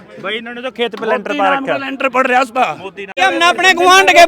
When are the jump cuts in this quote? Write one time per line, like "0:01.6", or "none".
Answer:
0:03.1

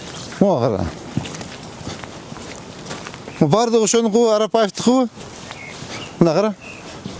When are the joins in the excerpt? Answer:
none

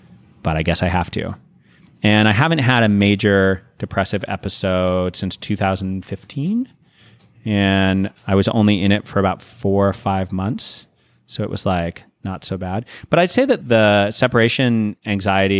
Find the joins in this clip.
0:13.6

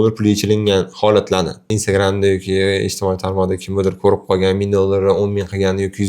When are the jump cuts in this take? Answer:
0:01.7

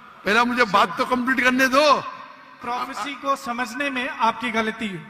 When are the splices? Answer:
0:02.6

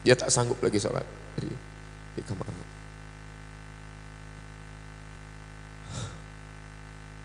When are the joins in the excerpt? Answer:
0:05.2

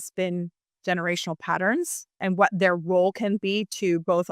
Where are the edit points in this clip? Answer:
0:02.2

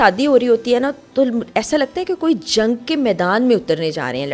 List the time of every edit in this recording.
none

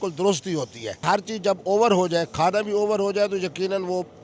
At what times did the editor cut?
0:01.0

